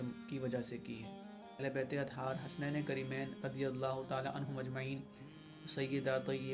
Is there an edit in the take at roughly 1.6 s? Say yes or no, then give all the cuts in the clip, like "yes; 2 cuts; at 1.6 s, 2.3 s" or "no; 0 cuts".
yes; 1 cut; at 1.6 s